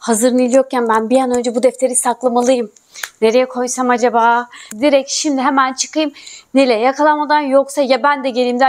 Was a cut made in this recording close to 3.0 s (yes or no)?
no